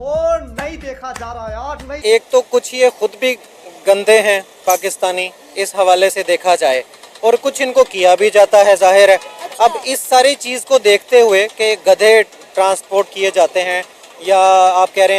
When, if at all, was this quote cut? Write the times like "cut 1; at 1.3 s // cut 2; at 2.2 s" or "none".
cut 1; at 1.9 s